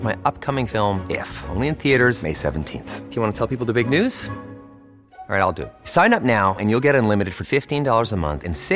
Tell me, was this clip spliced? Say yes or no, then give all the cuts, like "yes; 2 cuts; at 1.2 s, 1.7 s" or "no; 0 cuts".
no; 0 cuts